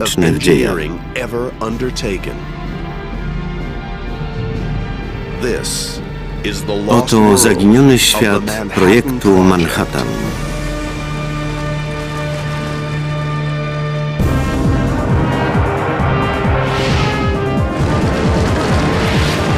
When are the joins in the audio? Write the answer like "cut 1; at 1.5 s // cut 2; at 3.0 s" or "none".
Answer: none